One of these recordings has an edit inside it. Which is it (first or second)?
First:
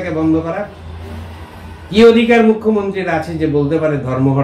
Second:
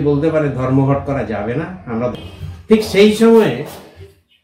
second